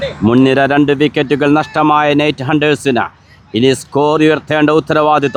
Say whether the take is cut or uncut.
uncut